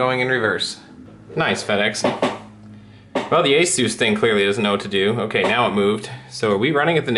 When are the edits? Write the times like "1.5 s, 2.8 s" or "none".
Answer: none